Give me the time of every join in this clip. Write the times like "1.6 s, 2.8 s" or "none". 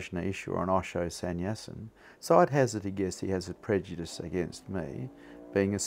none